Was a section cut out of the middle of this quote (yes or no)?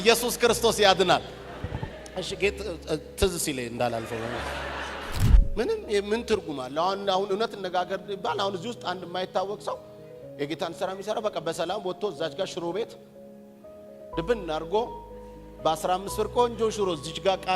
yes